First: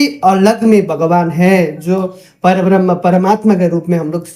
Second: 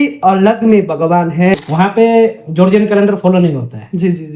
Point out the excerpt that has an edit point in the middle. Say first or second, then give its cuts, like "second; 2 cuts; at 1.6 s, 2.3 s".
second; 1 cut; at 1.6 s